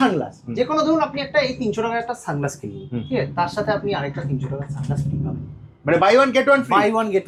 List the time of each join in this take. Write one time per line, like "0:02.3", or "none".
none